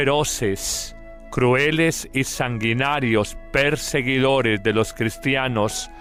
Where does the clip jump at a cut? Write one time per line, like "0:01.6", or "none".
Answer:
none